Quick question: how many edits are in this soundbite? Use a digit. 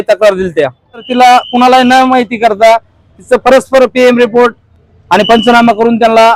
1